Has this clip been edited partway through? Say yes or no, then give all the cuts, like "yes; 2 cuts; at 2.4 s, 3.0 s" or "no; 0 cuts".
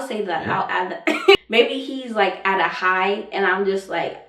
yes; 1 cut; at 1.3 s